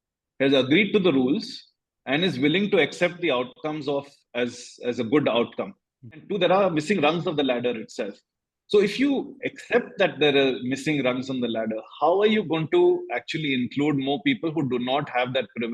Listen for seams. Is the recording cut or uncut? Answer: cut